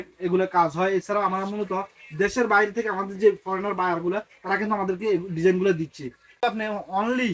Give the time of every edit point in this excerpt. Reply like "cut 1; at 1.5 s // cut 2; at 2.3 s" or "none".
cut 1; at 6.3 s